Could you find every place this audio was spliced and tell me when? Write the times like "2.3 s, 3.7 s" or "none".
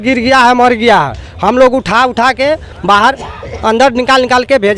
none